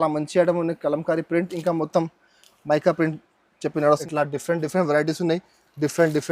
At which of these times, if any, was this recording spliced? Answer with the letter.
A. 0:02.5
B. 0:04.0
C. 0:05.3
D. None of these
B